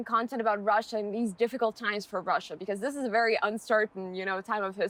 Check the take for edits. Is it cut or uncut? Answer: uncut